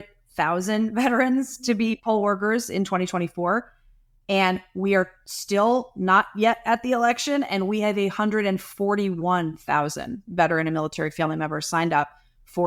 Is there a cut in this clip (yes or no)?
no